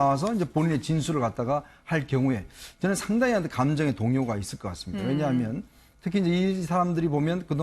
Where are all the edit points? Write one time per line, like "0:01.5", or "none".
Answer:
0:05.0